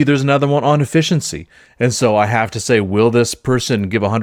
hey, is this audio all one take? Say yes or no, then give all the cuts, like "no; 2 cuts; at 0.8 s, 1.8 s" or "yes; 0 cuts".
yes; 0 cuts